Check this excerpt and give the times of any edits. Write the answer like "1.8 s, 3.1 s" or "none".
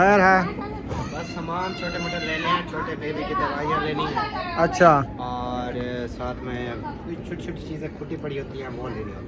none